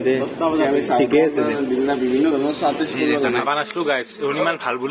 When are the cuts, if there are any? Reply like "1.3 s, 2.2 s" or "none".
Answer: 3.4 s